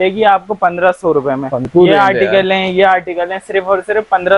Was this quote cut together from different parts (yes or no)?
yes